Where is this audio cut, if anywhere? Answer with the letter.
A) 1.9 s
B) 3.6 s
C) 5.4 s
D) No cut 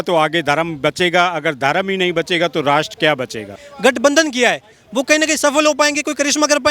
B